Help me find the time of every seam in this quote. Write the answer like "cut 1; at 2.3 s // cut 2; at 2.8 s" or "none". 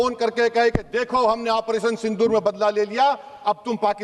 none